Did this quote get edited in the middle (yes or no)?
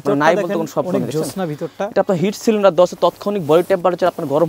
no